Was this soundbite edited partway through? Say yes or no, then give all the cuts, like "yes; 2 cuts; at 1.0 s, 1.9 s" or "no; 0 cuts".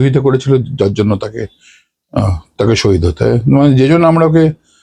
no; 0 cuts